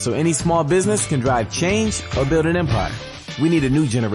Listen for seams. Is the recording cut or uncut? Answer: cut